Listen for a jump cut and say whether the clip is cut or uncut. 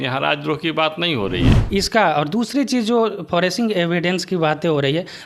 cut